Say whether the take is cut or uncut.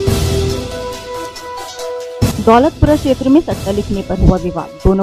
cut